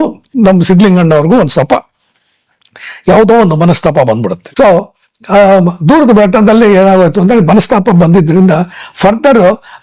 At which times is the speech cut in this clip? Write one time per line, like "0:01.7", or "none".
none